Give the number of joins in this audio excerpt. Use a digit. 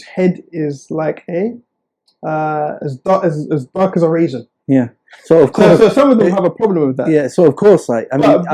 0